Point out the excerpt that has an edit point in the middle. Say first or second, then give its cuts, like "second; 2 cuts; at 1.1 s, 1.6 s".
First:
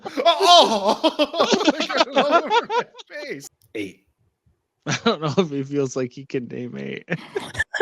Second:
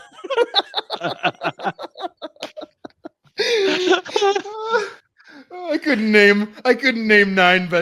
first; 1 cut; at 3.5 s